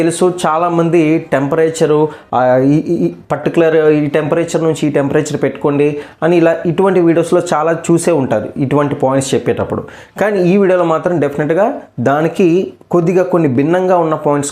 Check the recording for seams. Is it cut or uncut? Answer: uncut